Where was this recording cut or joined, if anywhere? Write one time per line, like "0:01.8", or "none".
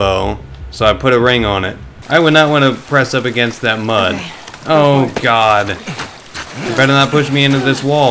0:01.9